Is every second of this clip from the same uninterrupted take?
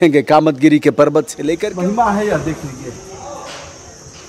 no; 1 cut; at 1.4 s

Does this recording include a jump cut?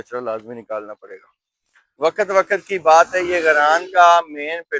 yes; 1 cut; at 2.0 s

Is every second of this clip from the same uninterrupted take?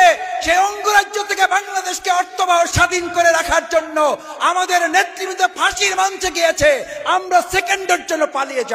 yes; 0 cuts

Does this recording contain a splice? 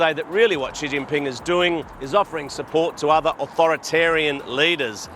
no; 0 cuts

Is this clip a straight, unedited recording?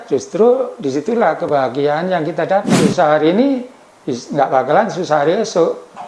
no; 1 cut; at 2.7 s

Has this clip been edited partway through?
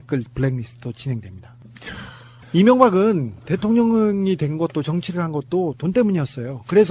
yes; 1 cut; at 2.7 s

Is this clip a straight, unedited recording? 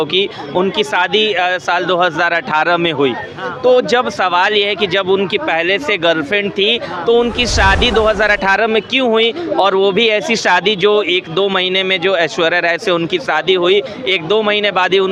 yes; 0 cuts

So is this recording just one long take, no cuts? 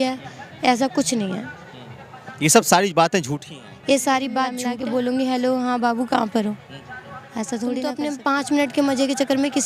no; 2 cuts; at 4.6 s, 7.9 s

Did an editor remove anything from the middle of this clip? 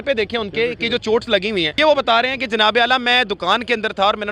yes; 1 cut; at 1.7 s

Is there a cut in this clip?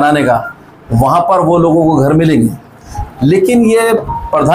no; 0 cuts

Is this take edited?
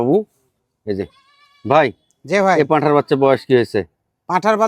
no; 0 cuts

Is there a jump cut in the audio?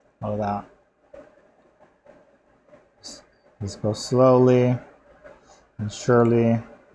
no; 0 cuts

